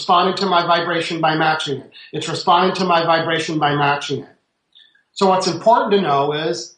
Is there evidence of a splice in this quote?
no; 0 cuts

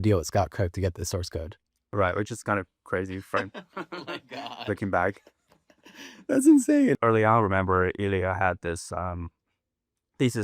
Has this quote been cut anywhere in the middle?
yes; 1 cut; at 7.0 s

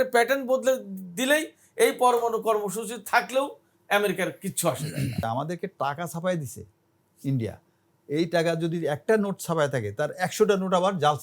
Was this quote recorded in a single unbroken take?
no; 2 cuts; at 5.2 s, 9.0 s

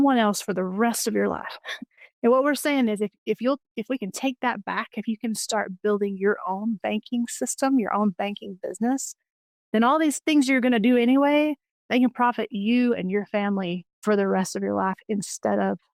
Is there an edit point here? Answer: no; 0 cuts

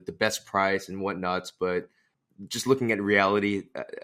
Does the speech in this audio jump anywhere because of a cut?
no; 0 cuts

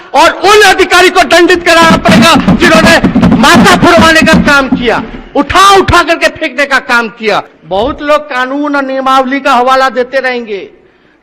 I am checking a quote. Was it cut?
yes; 1 cut; at 7.5 s

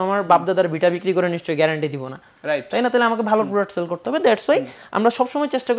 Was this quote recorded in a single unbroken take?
yes; 0 cuts

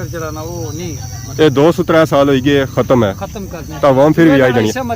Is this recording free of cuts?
yes; 0 cuts

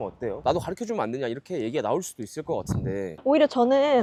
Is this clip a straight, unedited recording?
yes; 0 cuts

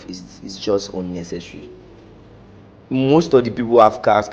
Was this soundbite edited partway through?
no; 0 cuts

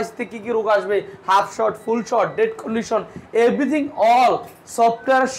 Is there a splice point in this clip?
no; 0 cuts

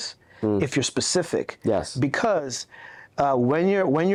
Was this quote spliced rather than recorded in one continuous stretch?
no; 0 cuts

